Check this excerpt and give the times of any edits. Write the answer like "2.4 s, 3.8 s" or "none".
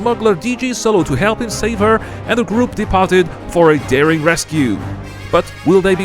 1.7 s